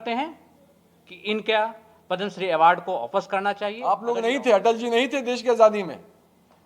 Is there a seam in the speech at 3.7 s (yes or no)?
yes